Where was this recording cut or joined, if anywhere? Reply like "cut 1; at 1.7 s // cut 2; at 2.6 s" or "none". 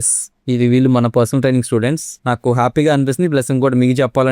cut 1; at 2.1 s

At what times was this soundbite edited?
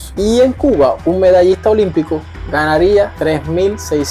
none

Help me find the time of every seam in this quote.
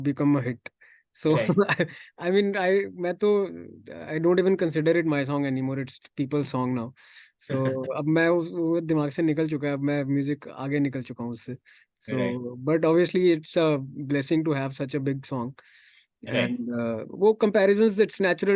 none

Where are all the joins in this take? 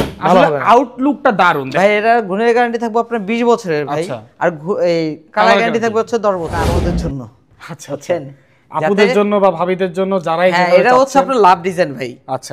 cut 1; at 1.7 s // cut 2; at 6.7 s

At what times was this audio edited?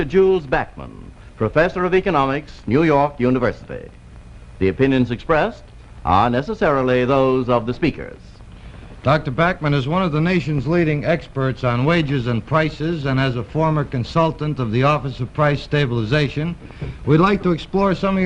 none

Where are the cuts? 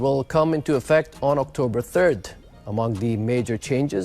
none

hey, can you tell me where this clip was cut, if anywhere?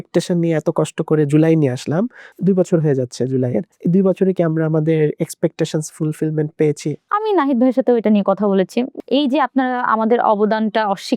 cut 1; at 2.2 s // cut 2; at 3.7 s // cut 3; at 7.0 s // cut 4; at 8.9 s

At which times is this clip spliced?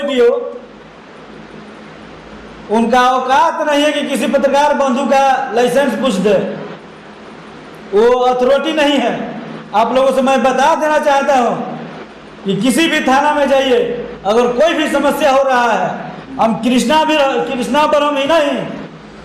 none

